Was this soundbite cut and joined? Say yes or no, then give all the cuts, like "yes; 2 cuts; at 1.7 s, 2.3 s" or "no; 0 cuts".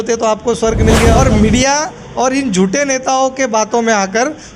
yes; 1 cut; at 1.2 s